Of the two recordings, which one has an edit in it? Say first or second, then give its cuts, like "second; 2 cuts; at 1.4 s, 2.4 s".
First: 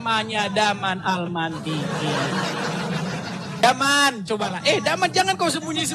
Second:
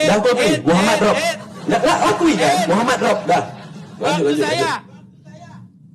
first; 1 cut; at 3.6 s